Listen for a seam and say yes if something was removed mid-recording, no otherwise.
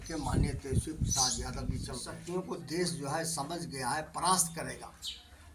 yes